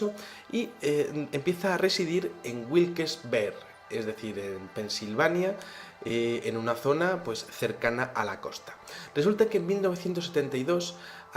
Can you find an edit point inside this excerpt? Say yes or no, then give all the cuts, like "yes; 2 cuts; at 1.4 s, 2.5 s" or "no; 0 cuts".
yes; 1 cut; at 7.1 s